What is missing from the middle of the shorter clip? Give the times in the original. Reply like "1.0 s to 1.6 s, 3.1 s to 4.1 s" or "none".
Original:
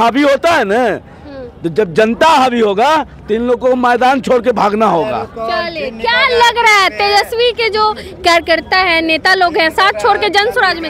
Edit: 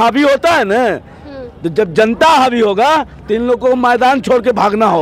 none